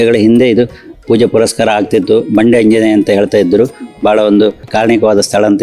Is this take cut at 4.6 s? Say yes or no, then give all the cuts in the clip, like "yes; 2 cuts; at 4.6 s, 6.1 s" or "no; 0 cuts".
yes; 1 cut; at 4.6 s